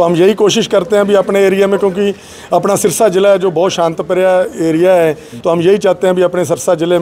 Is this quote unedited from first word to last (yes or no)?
no